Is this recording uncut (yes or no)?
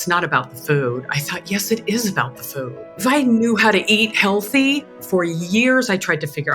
no